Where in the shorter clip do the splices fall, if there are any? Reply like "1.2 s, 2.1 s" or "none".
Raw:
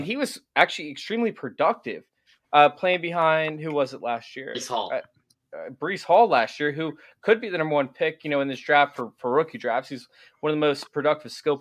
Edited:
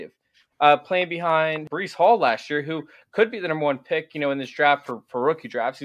1.6 s